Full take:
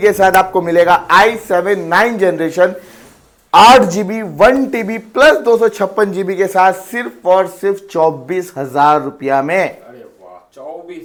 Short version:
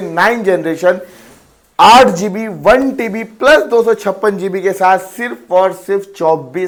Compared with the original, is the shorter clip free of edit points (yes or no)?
yes